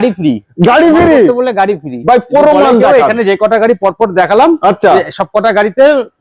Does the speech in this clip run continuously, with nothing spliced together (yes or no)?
yes